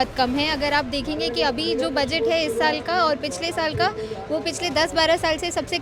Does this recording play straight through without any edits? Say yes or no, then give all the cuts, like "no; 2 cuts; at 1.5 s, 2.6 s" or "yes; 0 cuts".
yes; 0 cuts